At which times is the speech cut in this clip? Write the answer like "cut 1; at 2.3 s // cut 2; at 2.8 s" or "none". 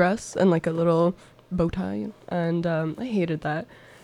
cut 1; at 1.3 s